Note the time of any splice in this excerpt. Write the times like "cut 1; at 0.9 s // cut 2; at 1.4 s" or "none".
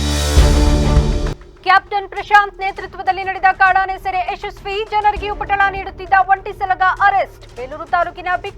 cut 1; at 1.3 s